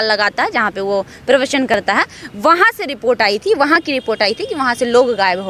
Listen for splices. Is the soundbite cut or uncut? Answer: uncut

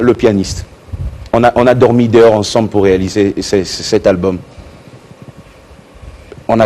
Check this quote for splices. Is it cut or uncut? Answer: uncut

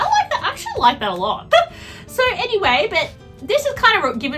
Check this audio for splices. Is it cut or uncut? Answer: cut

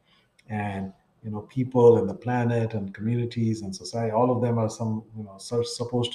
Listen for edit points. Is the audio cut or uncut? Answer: uncut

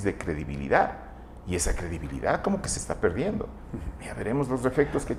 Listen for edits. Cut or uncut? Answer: uncut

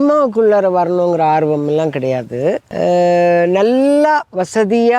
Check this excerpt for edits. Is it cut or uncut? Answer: cut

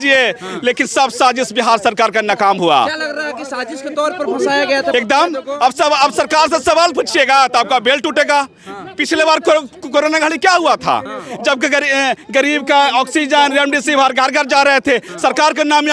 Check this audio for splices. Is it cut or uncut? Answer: uncut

